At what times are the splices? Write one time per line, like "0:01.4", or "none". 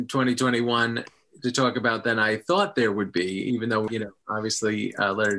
0:03.9